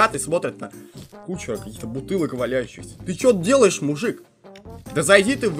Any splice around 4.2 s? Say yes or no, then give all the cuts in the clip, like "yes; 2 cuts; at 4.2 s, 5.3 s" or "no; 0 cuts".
no; 0 cuts